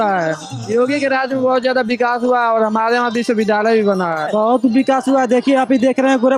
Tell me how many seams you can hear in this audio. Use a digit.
1